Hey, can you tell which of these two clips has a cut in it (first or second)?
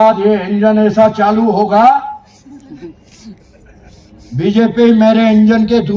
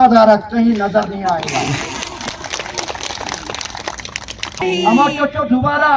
second